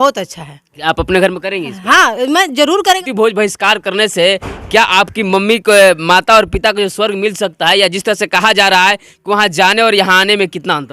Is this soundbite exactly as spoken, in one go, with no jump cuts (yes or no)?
no